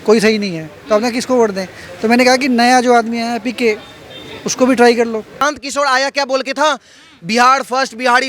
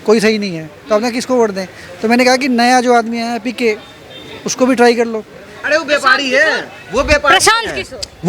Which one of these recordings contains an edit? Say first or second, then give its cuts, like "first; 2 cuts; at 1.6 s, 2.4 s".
first; 1 cut; at 5.4 s